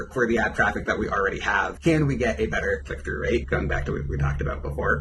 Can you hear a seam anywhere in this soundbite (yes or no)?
no